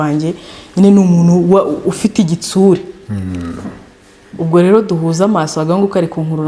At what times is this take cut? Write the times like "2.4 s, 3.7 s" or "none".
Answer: none